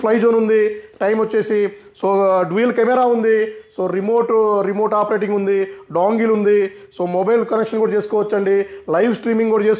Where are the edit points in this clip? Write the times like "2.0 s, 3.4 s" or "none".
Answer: none